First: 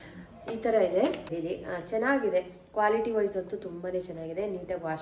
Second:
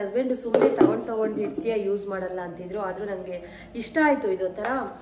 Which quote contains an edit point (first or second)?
first